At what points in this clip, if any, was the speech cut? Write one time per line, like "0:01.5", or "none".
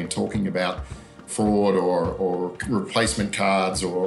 0:01.3